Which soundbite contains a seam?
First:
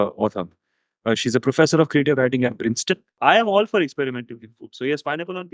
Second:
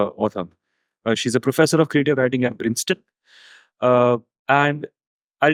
first; 1 cut; at 3.2 s

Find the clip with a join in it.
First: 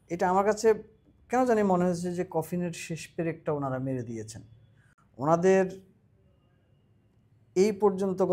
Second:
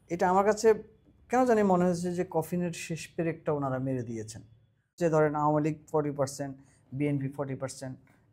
second; 1 cut; at 4.9 s

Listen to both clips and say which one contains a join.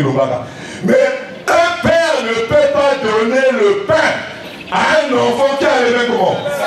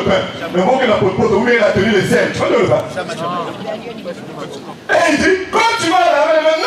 second; 1 cut; at 4.7 s

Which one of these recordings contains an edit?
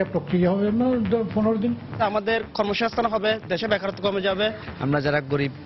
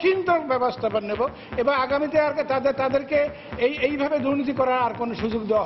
first; 2 cuts; at 1.9 s, 4.7 s

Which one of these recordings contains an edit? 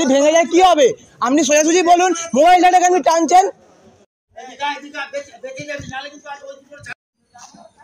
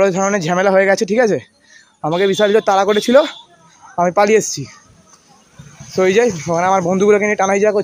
first; 2 cuts; at 4.5 s, 6.9 s

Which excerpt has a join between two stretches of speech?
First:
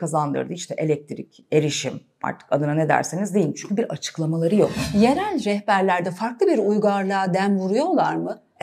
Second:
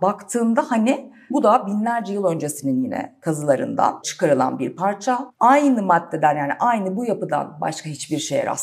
second; 3 cuts; at 1.3 s, 4.1 s, 5.3 s

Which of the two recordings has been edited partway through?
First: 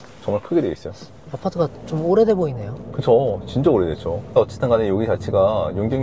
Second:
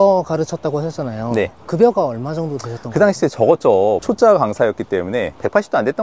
second; 1 cut; at 4.0 s

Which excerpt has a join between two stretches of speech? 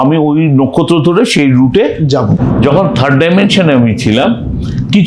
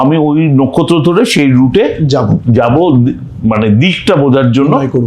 first; 1 cut; at 2.4 s

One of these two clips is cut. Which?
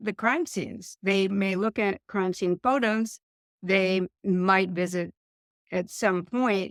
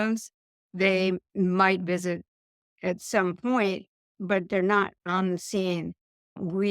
second; 1 cut; at 5.0 s

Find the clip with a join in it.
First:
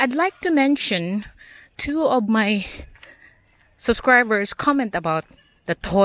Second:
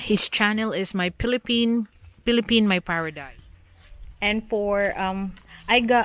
second; 1 cut; at 3.1 s

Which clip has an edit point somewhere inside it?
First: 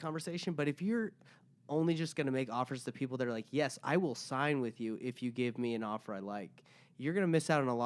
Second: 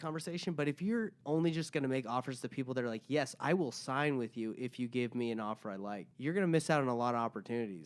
second; 2 cuts; at 1.2 s, 6.1 s

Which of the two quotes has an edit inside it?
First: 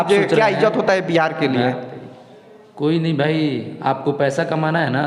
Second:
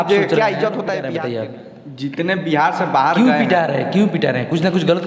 second; 1 cut; at 1.1 s

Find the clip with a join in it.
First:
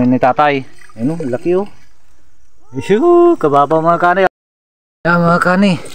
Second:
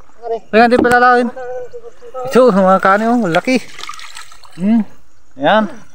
first; 1 cut; at 4.3 s

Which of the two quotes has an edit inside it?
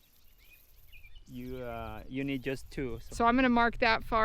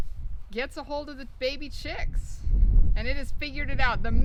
first; 1 cut; at 3.0 s

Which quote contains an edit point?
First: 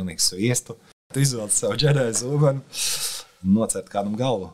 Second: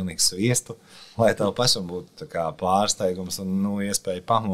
first; 1 cut; at 1.1 s

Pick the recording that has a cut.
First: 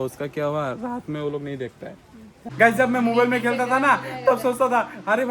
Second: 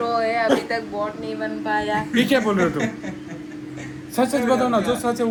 first; 1 cut; at 2.4 s

